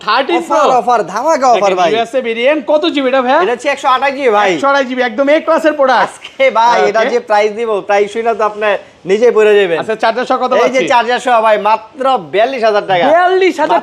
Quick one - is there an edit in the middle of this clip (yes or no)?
no